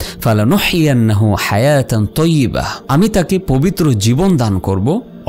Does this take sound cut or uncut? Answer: uncut